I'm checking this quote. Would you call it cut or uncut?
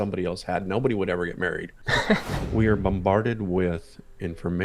cut